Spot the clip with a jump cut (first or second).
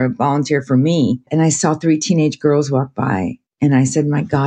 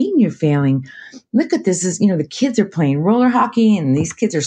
first